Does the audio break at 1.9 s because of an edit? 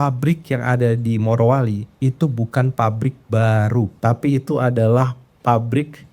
yes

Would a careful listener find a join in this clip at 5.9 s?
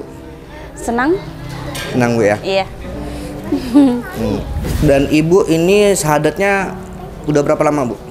no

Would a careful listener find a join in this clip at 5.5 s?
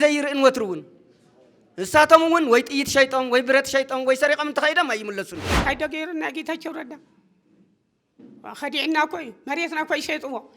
yes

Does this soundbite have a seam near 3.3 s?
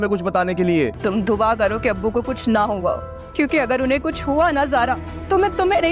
no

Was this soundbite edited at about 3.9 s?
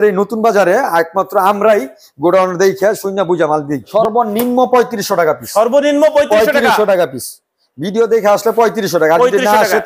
yes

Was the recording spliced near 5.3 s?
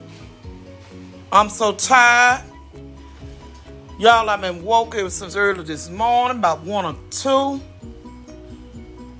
no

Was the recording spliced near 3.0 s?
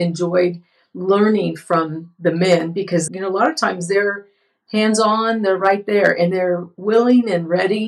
yes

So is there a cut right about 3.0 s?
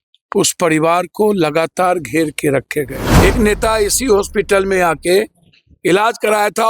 yes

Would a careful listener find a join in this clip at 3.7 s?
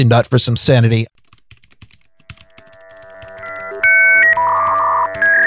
no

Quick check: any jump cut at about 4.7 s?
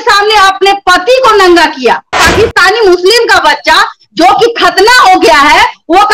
no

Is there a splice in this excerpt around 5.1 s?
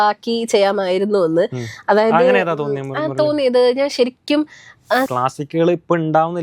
yes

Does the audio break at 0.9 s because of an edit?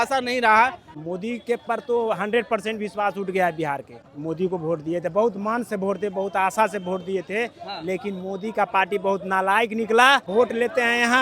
yes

